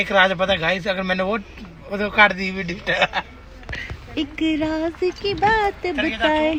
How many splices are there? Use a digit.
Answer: 0